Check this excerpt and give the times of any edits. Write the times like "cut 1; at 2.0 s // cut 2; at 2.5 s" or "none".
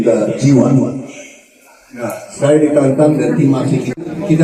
none